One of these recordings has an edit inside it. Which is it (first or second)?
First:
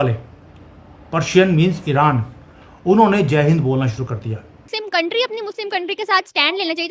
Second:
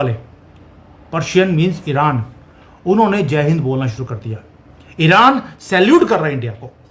first